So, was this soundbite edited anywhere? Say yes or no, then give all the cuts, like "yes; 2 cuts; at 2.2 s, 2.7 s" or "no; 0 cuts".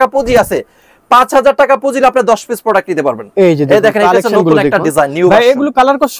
no; 0 cuts